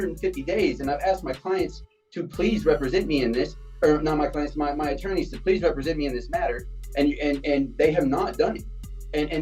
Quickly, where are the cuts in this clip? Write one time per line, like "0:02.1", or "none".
none